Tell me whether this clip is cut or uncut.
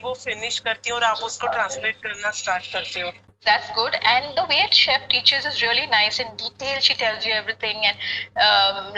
cut